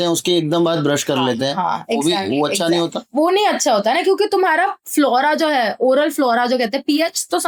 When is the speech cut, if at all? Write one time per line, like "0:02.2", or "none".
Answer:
none